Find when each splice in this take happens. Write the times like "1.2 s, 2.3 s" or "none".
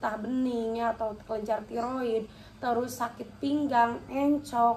none